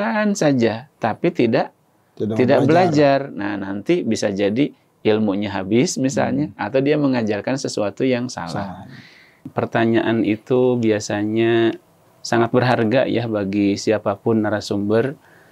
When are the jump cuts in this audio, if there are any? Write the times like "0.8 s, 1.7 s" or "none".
9.4 s